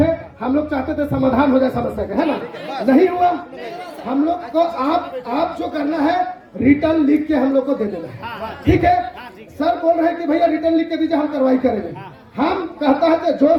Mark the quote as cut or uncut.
uncut